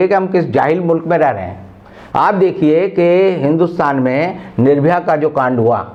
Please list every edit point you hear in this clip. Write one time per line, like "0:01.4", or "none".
none

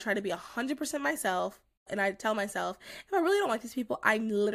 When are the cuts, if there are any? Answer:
0:01.8

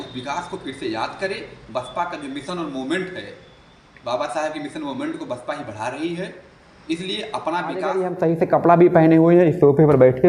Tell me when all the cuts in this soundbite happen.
0:08.0

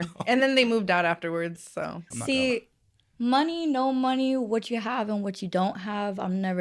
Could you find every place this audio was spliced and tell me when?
0:02.1

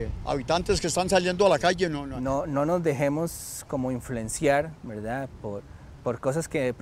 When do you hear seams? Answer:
0:02.1

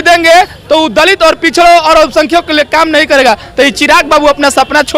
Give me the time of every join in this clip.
none

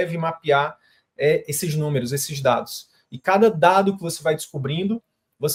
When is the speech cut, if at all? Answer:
none

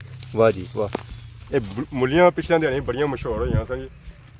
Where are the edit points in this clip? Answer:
none

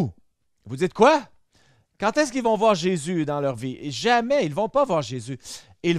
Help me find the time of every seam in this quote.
none

